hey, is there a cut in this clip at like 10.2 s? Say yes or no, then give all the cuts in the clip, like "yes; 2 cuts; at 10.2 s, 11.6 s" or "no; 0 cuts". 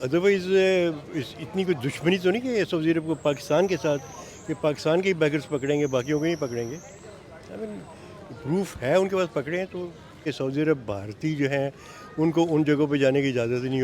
yes; 1 cut; at 10.2 s